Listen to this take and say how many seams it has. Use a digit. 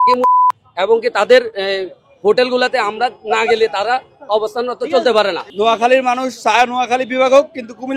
1